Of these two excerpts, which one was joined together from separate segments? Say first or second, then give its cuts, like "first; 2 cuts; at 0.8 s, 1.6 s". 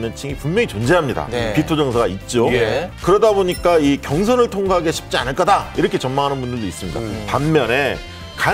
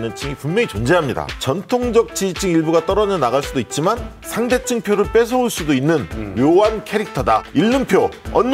second; 3 cuts; at 1.2 s, 4.2 s, 7.5 s